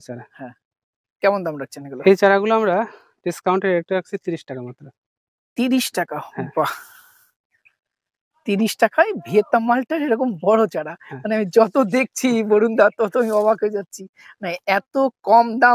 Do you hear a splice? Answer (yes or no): no